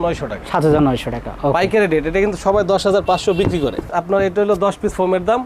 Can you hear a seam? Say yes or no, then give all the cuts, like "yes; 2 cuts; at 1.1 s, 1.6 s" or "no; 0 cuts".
yes; 1 cut; at 3.8 s